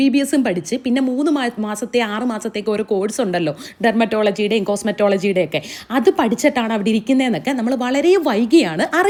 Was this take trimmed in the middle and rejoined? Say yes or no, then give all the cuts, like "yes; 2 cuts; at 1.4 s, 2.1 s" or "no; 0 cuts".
no; 0 cuts